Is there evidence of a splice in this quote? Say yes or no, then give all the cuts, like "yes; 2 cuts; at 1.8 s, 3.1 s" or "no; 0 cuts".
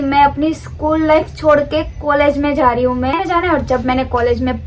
yes; 1 cut; at 3.1 s